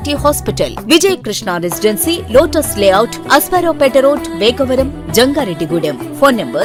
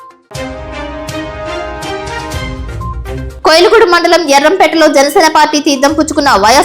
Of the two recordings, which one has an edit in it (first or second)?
second